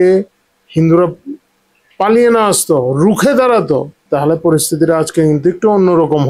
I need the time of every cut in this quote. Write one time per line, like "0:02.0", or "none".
0:04.0